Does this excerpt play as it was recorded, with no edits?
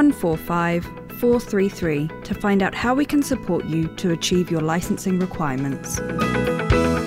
no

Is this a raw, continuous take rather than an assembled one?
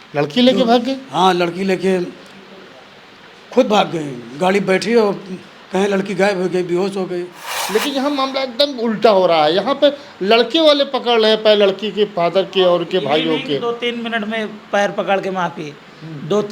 no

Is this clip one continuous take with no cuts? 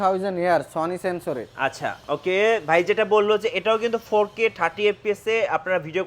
yes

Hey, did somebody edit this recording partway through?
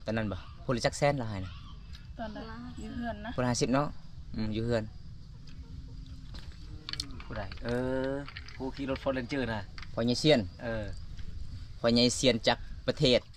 no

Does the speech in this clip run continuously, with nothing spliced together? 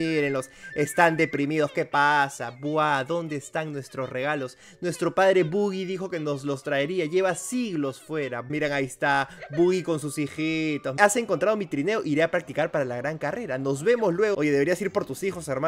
no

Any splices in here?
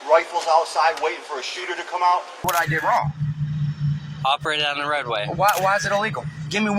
yes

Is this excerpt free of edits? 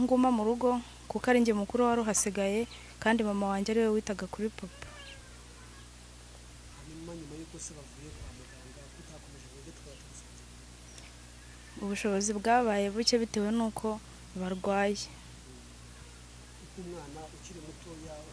yes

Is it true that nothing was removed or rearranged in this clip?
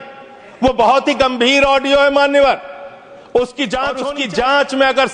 no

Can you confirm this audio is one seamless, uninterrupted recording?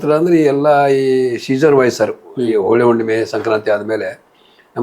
yes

